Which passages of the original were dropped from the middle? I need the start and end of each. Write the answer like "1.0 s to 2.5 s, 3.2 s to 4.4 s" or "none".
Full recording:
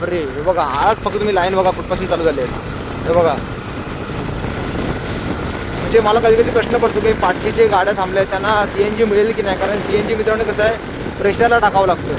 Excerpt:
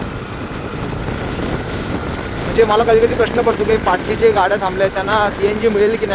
none